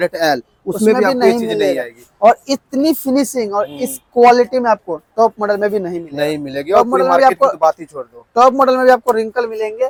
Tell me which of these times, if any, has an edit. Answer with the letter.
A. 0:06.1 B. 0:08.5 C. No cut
C